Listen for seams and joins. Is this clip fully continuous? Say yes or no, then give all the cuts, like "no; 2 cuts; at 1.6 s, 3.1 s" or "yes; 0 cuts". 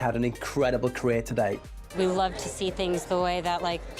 no; 1 cut; at 1.8 s